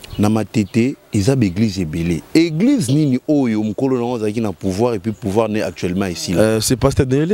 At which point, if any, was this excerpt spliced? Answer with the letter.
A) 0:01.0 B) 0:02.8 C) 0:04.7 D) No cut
A